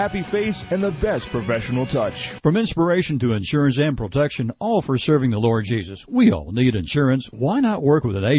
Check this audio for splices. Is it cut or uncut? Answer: cut